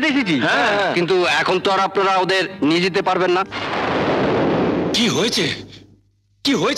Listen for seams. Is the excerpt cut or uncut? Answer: uncut